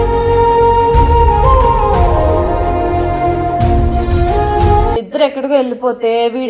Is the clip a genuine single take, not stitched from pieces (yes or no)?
no